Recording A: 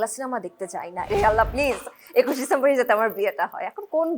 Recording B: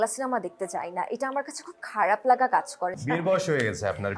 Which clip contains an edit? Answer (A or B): A